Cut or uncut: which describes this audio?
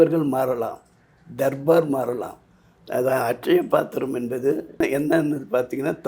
cut